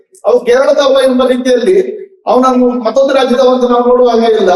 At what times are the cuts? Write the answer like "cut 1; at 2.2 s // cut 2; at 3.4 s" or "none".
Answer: none